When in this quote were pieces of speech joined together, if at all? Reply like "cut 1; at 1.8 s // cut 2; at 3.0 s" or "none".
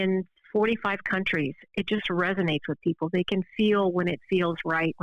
none